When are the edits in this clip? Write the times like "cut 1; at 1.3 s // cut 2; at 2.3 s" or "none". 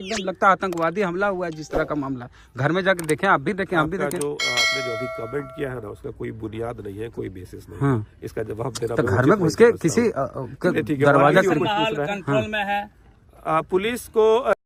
none